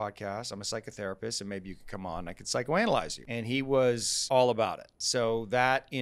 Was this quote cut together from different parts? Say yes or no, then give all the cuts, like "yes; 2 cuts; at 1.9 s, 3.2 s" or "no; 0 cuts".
yes; 3 cuts; at 3.2 s, 4.1 s, 4.9 s